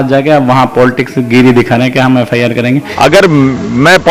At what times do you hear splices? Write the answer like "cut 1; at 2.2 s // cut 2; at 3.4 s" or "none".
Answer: cut 1; at 2.9 s